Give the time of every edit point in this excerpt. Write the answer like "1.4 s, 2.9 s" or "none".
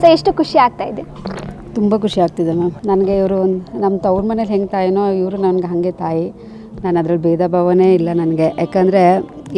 none